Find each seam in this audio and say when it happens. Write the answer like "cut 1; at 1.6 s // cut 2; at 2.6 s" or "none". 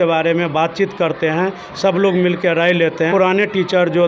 cut 1; at 3.1 s